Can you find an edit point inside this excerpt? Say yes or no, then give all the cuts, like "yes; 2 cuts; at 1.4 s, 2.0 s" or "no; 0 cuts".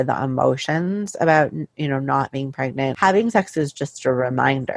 yes; 1 cut; at 2.9 s